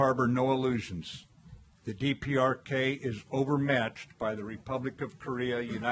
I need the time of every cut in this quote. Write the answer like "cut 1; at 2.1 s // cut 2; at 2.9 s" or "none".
cut 1; at 4.9 s